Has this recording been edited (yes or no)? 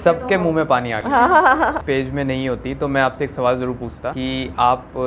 yes